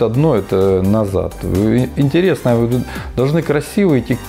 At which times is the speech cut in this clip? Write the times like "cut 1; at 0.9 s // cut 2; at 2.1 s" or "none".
none

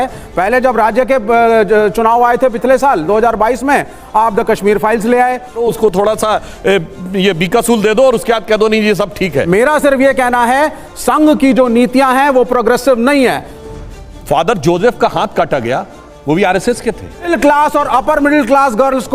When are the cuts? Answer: cut 1; at 5.6 s // cut 2; at 9.5 s // cut 3; at 13.5 s // cut 4; at 17.1 s

